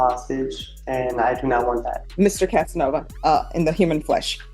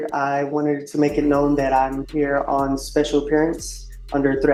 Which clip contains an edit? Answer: first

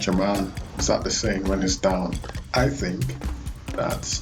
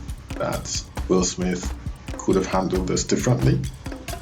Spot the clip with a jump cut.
first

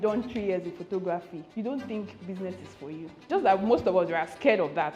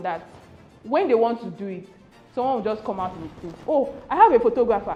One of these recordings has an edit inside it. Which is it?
first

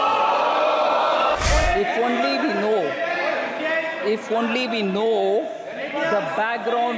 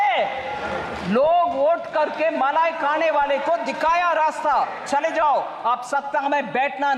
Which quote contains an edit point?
first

